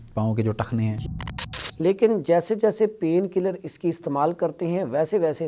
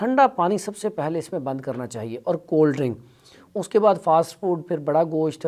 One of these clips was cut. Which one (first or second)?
first